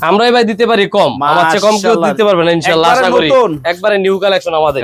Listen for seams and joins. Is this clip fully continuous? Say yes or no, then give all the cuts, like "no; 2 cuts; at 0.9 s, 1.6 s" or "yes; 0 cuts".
yes; 0 cuts